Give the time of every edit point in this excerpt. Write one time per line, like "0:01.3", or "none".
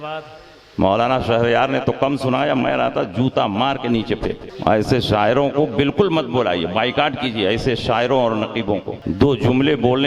0:04.5
0:08.9